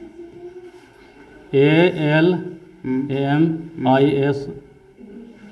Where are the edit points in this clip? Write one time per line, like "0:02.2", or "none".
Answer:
none